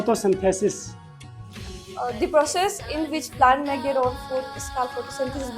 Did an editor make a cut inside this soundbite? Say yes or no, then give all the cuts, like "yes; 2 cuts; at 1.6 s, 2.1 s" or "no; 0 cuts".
no; 0 cuts